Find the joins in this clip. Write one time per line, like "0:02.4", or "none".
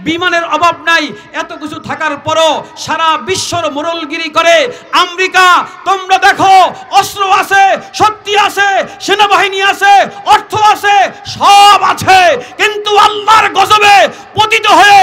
none